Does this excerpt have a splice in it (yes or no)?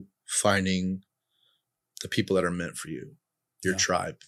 no